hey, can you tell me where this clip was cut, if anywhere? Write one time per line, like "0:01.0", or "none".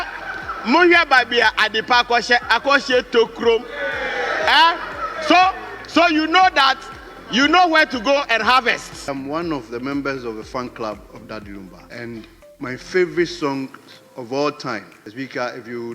0:09.1
0:11.8
0:15.0